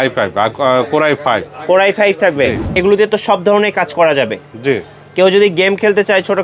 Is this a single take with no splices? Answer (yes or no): no